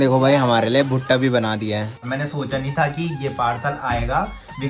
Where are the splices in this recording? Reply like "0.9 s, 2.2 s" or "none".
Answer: 2.0 s